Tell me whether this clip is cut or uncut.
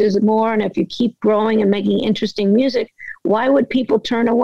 uncut